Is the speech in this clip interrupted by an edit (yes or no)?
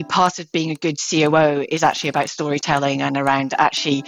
no